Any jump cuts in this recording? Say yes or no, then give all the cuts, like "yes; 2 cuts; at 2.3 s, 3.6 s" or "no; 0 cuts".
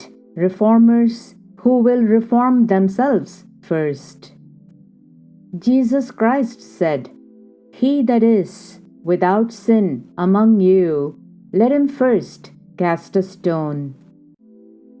yes; 3 cuts; at 4.0 s, 5.5 s, 14.0 s